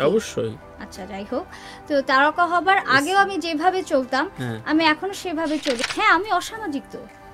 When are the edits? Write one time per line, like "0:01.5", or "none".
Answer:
0:05.8